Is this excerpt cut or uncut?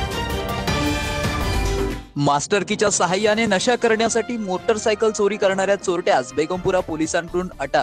uncut